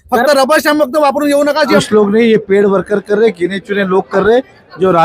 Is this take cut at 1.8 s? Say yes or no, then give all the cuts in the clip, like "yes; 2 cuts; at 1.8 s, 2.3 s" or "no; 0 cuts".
yes; 1 cut; at 1.8 s